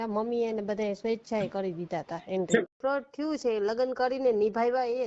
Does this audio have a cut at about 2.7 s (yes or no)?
yes